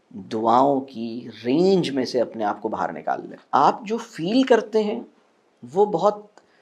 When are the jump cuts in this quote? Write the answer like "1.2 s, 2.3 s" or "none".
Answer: 3.3 s